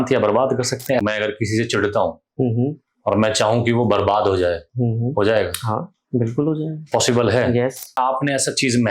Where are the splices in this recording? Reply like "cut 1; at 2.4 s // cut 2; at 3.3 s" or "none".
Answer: cut 1; at 1.0 s // cut 2; at 8.0 s